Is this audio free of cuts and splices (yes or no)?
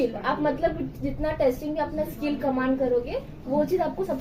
yes